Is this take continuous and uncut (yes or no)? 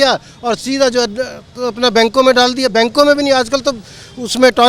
yes